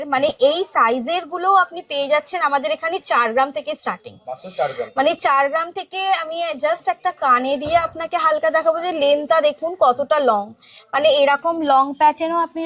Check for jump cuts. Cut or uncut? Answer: uncut